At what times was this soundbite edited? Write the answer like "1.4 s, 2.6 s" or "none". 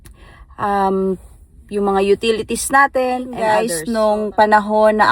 3.3 s